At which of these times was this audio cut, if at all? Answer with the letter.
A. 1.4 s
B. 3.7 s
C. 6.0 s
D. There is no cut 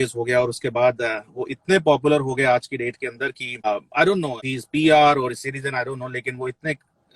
B